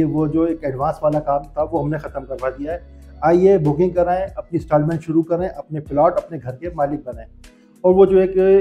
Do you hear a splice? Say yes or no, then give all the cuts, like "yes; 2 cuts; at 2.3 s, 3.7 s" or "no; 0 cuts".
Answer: no; 0 cuts